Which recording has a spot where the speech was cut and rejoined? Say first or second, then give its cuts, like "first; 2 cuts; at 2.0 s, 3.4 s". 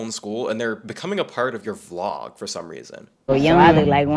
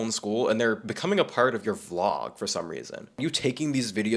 second; 1 cut; at 3.2 s